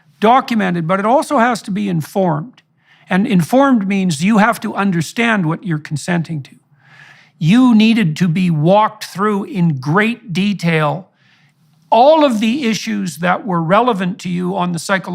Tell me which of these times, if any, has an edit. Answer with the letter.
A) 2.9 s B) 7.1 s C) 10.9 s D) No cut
B